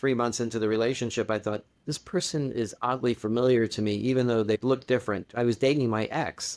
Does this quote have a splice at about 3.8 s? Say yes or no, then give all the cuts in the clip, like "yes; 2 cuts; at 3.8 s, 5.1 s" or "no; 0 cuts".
no; 1 cut; at 5.3 s